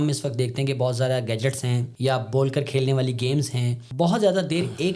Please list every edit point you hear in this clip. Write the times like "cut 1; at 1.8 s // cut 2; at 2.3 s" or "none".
cut 1; at 1.9 s // cut 2; at 3.8 s